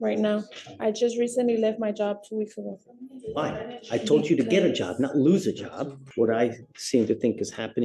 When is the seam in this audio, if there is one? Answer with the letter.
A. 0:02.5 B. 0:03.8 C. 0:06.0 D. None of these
C